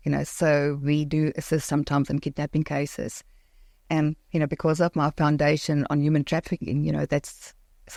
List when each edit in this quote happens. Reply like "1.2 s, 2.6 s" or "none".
none

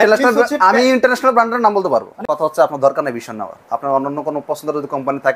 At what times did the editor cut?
2.1 s

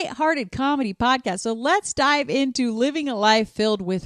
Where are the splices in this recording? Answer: none

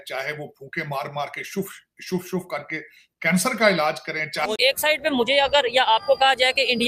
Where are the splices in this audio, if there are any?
4.5 s

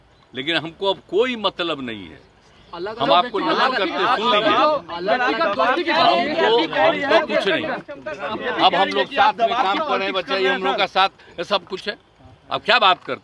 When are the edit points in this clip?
none

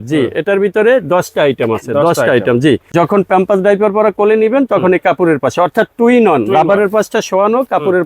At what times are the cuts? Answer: 2.9 s

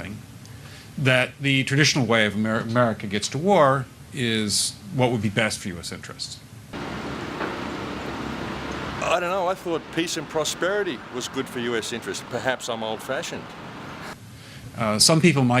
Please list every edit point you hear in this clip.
none

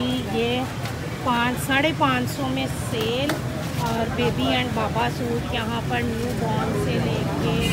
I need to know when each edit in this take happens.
none

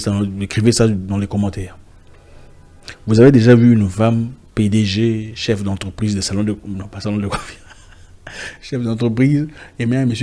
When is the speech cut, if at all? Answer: none

